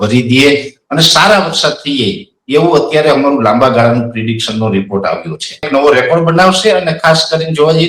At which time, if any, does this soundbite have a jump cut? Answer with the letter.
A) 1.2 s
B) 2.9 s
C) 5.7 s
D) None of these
C